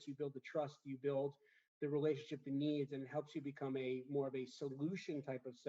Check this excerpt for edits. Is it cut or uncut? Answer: uncut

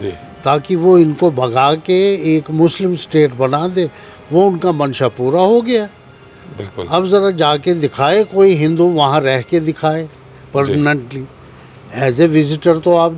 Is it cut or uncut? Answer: uncut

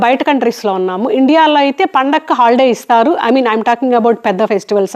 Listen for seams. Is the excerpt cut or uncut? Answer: uncut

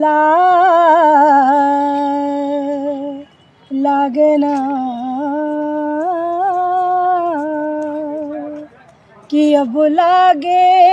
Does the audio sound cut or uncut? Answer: uncut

